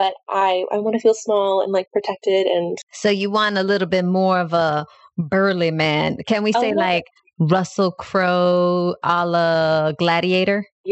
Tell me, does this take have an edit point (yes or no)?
no